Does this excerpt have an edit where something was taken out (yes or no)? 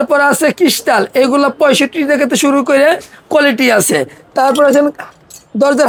no